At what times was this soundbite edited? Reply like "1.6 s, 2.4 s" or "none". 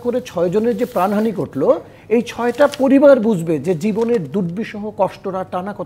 none